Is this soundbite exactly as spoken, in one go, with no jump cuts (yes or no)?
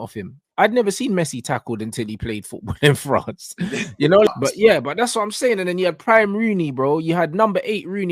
no